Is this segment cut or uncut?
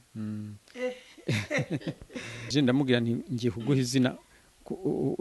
cut